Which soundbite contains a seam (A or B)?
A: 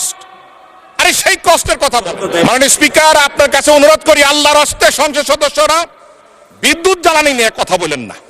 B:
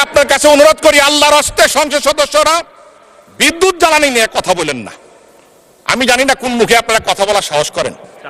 A